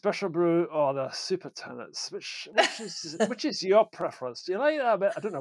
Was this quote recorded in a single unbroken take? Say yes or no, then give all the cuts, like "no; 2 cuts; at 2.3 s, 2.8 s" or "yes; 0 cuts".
yes; 0 cuts